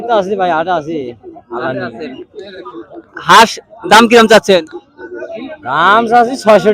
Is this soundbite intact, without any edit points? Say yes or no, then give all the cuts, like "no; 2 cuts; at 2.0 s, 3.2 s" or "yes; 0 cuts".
yes; 0 cuts